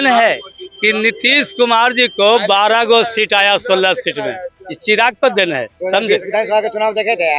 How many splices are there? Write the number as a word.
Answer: zero